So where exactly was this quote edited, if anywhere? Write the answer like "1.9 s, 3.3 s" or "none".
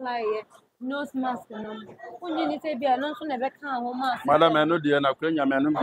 none